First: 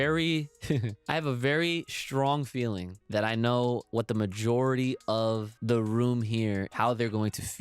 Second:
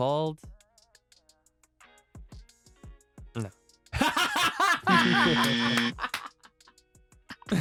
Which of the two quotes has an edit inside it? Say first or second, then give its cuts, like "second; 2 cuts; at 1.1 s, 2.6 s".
first; 5 cuts; at 0.9 s, 2.9 s, 3.9 s, 5.5 s, 6.7 s